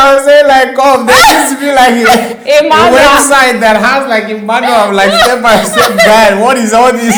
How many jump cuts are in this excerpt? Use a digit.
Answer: 0